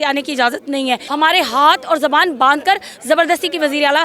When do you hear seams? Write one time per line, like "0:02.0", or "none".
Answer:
0:01.1